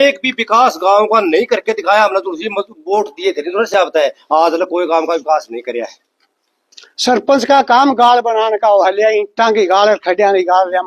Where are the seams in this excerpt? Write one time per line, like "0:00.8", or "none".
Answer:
none